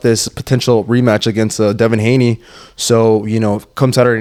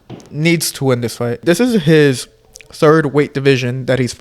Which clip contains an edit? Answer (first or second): second